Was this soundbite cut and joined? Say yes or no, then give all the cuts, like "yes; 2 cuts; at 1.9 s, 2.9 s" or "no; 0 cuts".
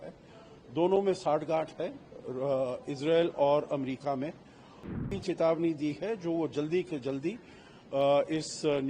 yes; 1 cut; at 5.0 s